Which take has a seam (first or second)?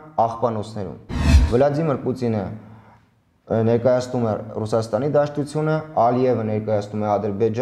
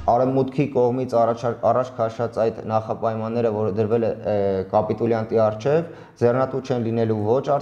first